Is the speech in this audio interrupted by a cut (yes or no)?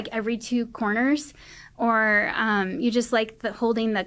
no